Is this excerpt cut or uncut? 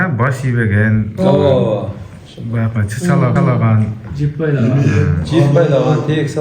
uncut